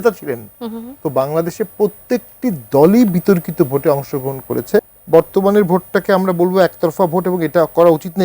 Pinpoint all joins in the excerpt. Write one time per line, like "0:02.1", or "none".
0:05.0